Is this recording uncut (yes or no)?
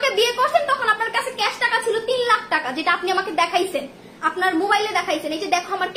yes